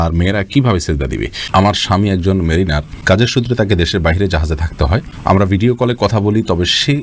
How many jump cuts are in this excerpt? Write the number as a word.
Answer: three